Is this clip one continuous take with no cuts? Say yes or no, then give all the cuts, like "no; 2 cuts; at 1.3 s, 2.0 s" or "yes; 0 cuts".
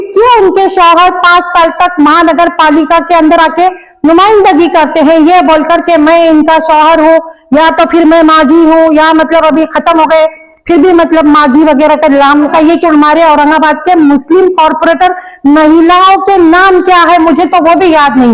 no; 1 cut; at 12.5 s